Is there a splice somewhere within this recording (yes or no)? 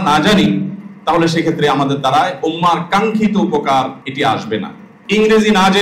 yes